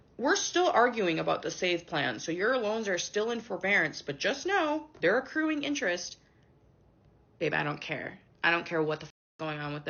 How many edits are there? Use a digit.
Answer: 0